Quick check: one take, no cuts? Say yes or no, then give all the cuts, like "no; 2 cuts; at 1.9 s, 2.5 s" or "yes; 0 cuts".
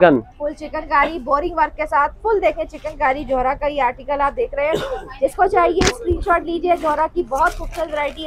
yes; 0 cuts